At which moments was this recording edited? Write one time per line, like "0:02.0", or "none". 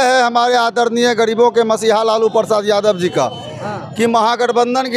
none